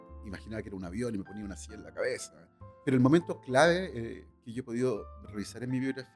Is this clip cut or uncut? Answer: cut